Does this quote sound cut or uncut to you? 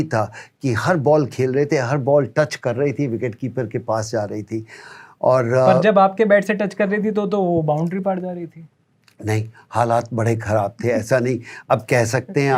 uncut